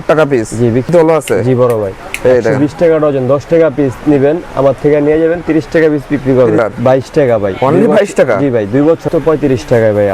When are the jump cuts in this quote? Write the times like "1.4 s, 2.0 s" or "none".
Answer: 0.9 s, 6.6 s, 9.0 s